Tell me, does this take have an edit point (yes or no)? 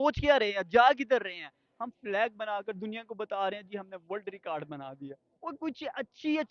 no